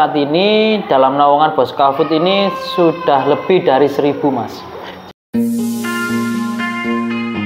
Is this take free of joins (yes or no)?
no